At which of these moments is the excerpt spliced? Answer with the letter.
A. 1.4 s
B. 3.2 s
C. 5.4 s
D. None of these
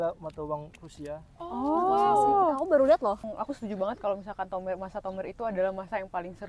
B